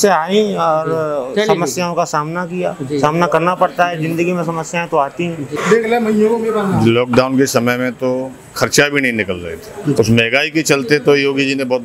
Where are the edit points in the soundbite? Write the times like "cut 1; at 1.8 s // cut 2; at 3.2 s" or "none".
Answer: cut 1; at 5.6 s // cut 2; at 10.0 s